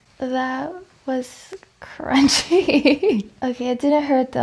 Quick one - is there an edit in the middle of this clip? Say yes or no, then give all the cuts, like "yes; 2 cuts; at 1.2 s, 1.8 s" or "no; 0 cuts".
yes; 1 cut; at 3.3 s